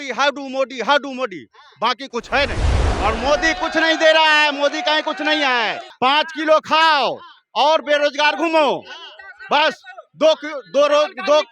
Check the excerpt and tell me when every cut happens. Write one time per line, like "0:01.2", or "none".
0:02.9
0:05.8